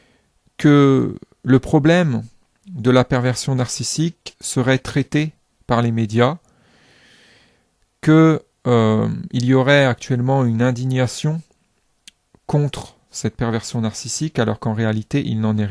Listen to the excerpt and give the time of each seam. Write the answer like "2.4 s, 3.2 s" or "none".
10.7 s